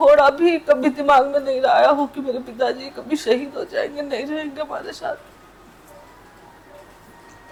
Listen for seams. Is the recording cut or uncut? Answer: uncut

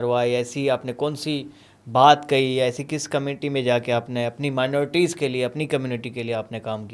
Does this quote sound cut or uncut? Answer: uncut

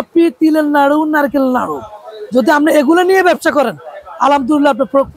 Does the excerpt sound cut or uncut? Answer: uncut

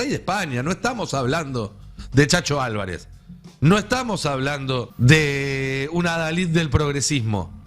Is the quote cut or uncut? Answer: cut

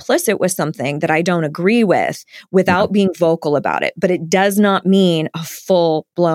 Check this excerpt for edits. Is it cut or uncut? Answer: uncut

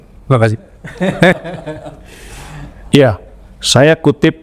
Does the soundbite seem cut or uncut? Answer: cut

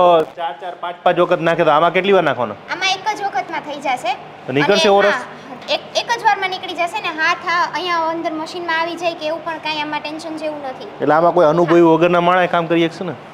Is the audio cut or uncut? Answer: uncut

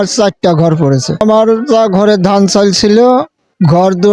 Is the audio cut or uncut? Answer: cut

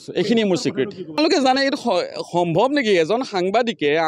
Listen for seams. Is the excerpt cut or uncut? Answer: cut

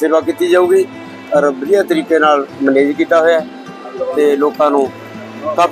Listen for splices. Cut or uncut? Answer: uncut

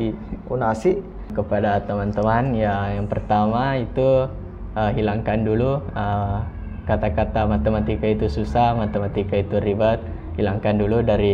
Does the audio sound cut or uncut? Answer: cut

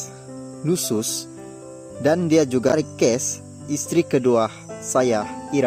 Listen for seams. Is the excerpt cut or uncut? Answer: uncut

